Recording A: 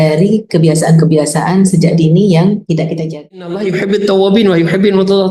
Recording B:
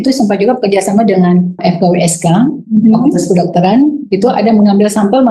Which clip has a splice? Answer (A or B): A